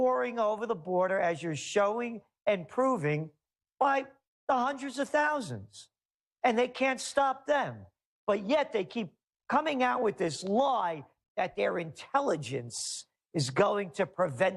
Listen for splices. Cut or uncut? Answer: cut